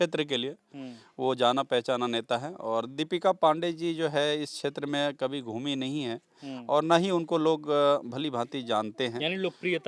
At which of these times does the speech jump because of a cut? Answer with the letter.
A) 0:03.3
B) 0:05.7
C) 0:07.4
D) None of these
D